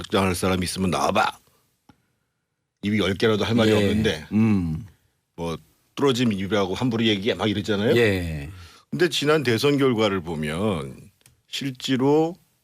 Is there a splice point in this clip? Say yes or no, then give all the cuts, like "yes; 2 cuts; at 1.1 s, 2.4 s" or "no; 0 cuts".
yes; 1 cut; at 1.1 s